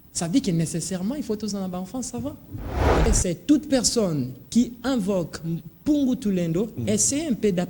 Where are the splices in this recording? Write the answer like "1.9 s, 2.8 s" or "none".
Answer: 3.1 s

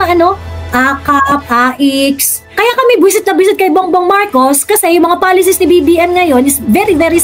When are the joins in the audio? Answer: 2.4 s

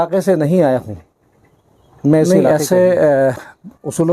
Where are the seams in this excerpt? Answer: 2.3 s

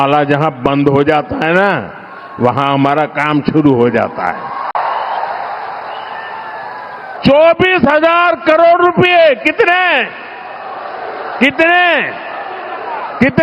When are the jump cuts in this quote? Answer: 4.7 s, 7.2 s

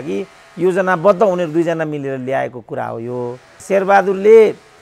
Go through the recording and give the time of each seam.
3.5 s

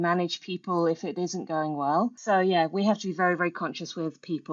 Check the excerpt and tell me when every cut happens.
2.2 s

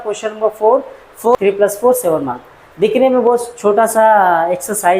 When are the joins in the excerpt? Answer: 1.3 s

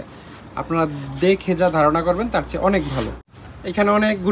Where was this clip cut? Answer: 3.2 s

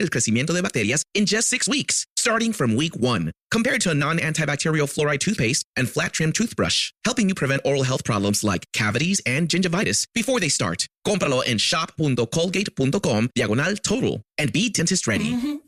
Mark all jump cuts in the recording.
none

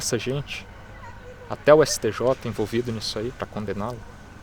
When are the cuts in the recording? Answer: 3.4 s

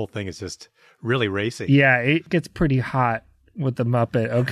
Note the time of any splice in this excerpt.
2.3 s

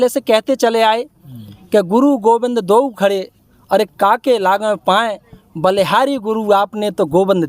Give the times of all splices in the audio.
none

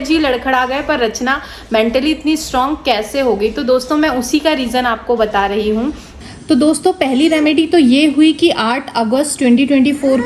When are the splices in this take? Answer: 6.3 s

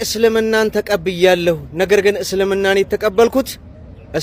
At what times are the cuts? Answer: none

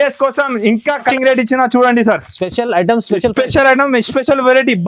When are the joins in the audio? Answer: 1.1 s

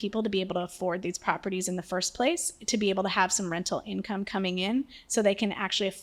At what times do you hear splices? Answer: none

